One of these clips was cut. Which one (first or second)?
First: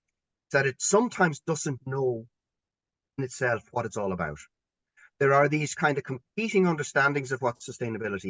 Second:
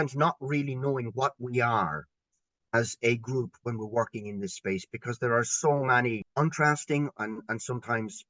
second